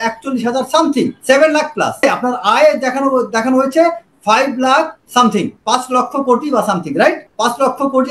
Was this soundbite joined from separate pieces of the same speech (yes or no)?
yes